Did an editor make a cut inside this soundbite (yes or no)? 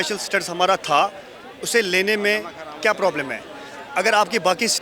no